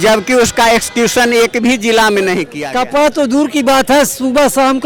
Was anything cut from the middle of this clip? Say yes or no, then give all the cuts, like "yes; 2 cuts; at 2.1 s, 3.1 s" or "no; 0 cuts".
yes; 1 cut; at 2.6 s